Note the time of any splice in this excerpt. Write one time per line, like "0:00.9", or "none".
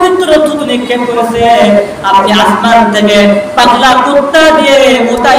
none